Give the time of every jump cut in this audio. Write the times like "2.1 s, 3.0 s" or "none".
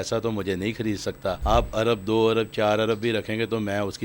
1.4 s